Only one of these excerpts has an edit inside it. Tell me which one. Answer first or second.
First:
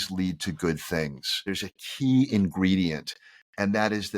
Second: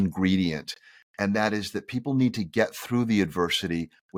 first